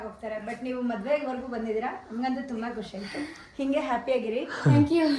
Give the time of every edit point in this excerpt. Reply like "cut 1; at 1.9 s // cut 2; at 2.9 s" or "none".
none